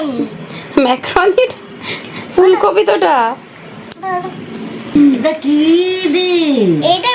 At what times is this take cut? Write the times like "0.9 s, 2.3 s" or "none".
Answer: 4.9 s

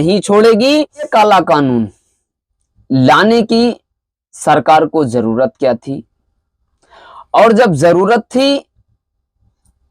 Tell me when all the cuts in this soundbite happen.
1.1 s

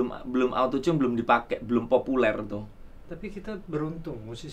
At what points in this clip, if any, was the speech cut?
none

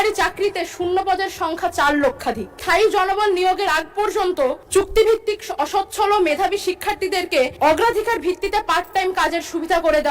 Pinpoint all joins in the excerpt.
2.6 s, 4.6 s, 7.5 s

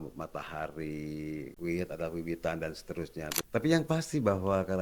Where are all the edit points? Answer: 1.5 s, 3.4 s

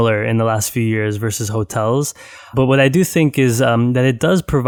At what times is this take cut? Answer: none

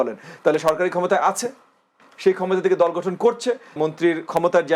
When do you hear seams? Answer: 3.8 s

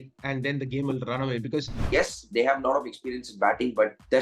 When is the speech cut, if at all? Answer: 1.8 s

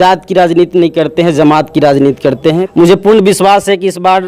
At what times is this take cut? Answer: 2.6 s

